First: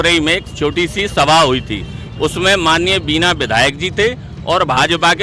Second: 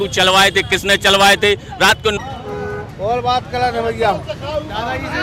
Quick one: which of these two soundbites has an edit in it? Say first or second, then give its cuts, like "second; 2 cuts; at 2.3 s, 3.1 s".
second; 1 cut; at 2.2 s